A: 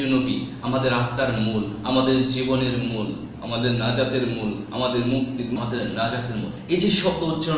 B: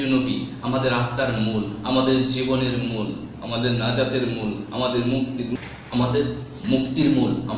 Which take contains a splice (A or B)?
A